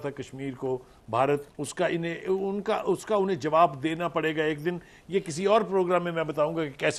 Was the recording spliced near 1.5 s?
no; 0 cuts

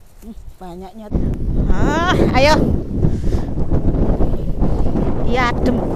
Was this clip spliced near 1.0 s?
yes; 1 cut; at 1.0 s

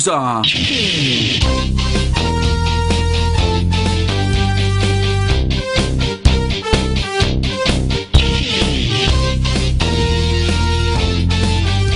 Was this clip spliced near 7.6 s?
no; 0 cuts

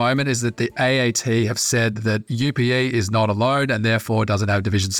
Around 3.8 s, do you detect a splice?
no; 1 cut; at 2.2 s

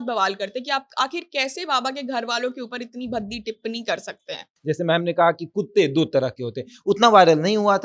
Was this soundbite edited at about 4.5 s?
yes; 1 cut; at 4.5 s

